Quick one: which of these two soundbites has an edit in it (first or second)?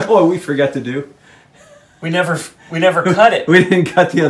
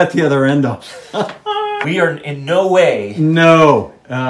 second